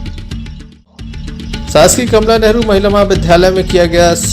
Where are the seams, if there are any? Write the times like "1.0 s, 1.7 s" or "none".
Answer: 1.5 s